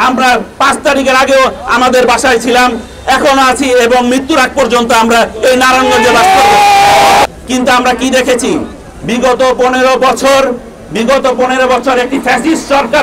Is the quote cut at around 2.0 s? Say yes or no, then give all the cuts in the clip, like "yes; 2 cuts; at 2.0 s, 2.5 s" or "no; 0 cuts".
no; 1 cut; at 7.2 s